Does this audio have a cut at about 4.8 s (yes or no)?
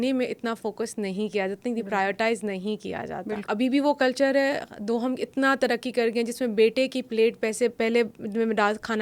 no